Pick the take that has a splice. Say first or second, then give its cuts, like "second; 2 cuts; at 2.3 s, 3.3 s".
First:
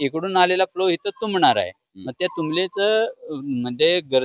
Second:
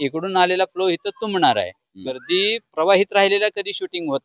second; 1 cut; at 2.2 s